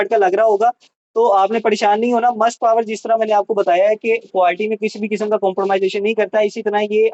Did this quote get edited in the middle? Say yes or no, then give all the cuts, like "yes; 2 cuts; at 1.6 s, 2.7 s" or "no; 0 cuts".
no; 0 cuts